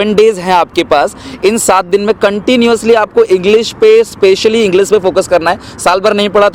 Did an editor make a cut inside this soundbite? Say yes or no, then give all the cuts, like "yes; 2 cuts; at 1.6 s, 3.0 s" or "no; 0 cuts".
no; 0 cuts